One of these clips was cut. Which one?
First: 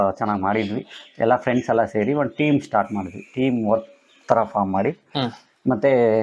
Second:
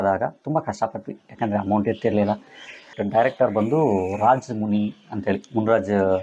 second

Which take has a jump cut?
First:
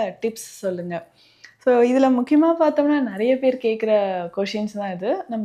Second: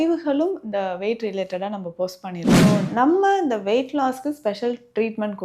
second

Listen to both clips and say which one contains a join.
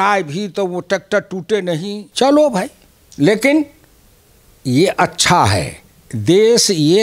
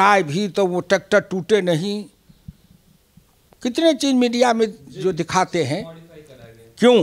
first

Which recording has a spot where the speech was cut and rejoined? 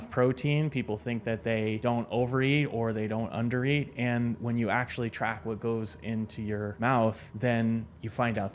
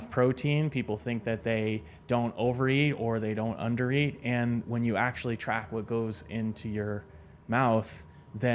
first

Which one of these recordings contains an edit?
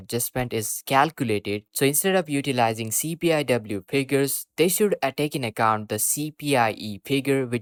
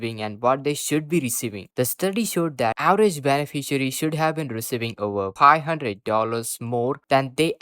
second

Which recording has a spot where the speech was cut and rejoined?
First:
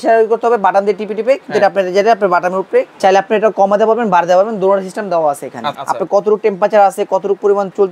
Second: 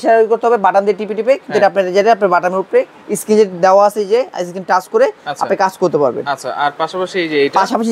first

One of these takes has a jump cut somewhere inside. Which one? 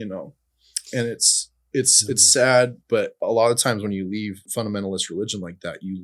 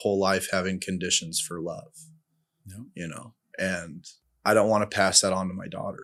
first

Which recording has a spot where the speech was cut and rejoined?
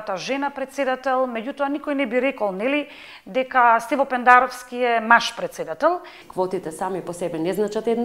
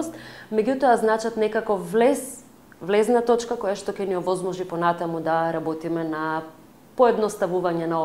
first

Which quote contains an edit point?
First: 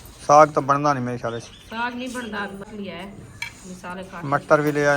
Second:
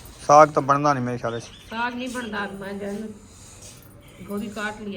first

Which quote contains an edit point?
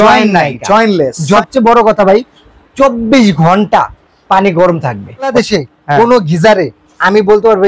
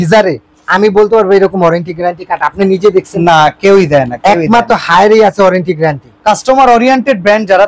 first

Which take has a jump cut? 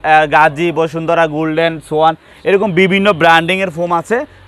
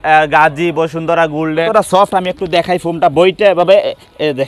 second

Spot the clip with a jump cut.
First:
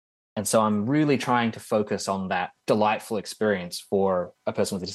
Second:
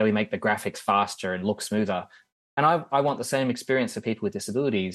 first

